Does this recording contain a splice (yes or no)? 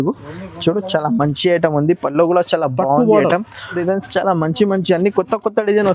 yes